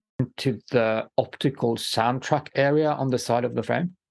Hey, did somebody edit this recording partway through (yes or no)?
no